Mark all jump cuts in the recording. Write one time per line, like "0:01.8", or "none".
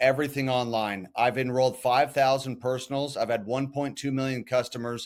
none